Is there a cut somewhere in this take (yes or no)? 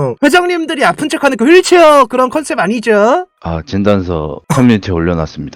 yes